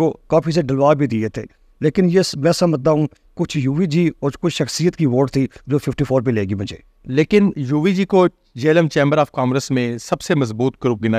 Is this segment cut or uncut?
uncut